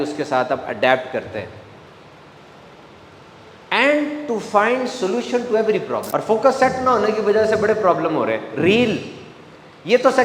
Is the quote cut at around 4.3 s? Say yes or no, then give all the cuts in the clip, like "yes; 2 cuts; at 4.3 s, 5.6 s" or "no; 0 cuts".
no; 1 cut; at 6.0 s